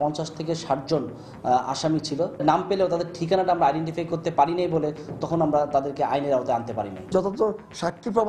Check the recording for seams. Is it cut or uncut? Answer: cut